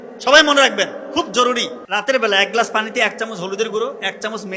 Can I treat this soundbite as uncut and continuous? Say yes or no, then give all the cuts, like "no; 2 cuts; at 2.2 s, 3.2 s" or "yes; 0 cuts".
no; 1 cut; at 1.8 s